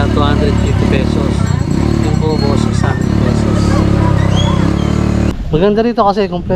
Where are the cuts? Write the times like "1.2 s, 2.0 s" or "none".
5.3 s